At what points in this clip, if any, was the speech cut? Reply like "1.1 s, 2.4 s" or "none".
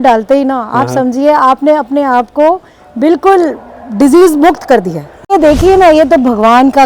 5.3 s